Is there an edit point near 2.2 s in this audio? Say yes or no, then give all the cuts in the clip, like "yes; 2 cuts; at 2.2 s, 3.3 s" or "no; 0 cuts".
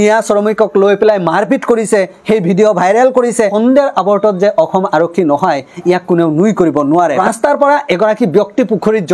no; 2 cuts; at 3.5 s, 7.2 s